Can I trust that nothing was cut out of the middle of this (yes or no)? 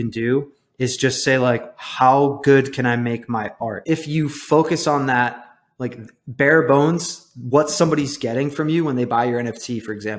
yes